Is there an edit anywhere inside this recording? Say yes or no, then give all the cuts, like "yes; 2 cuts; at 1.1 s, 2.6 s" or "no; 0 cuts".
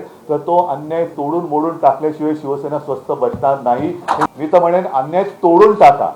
yes; 1 cut; at 4.3 s